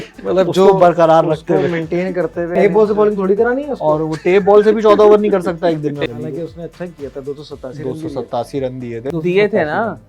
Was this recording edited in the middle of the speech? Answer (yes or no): yes